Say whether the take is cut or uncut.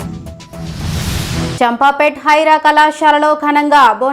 cut